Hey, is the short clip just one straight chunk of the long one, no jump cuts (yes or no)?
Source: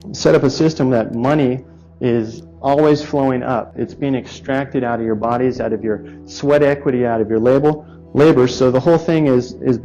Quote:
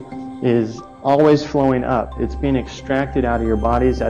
yes